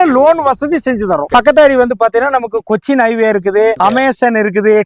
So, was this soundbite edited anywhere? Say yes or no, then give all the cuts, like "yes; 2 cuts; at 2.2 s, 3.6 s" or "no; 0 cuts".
yes; 2 cuts; at 1.2 s, 3.8 s